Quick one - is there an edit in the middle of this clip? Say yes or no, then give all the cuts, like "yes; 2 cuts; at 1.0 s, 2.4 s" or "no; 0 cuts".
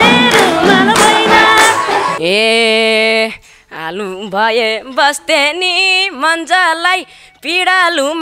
yes; 1 cut; at 2.2 s